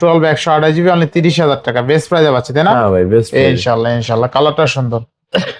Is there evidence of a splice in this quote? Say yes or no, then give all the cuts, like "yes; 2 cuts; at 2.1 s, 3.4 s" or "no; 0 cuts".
no; 0 cuts